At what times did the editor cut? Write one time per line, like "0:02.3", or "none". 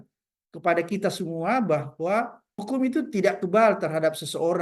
0:02.6